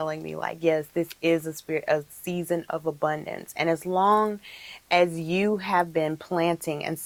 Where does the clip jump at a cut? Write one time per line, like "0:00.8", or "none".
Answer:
none